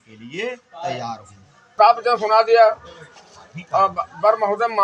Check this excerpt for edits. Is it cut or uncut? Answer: cut